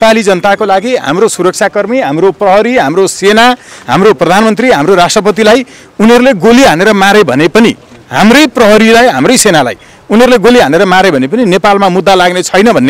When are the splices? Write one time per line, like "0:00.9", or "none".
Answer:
none